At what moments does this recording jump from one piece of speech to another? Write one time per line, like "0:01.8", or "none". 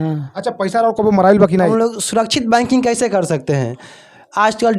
0:01.7